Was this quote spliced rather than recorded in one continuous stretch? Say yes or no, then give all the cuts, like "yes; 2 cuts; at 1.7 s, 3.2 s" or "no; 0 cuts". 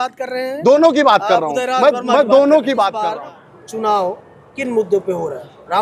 yes; 1 cut; at 3.1 s